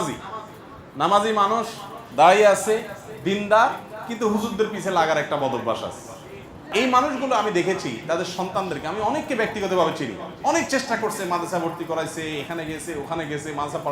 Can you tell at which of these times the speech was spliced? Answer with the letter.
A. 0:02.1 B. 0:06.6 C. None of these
B